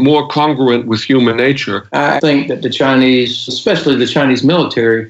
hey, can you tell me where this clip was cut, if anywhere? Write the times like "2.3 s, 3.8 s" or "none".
2.0 s